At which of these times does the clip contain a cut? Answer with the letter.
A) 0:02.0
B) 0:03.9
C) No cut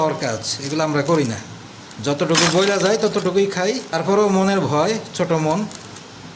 B